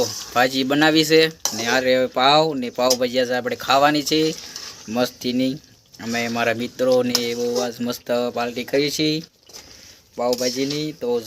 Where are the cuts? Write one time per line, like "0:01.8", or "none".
none